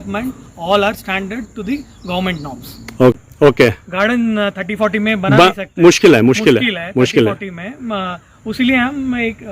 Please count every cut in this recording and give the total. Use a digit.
1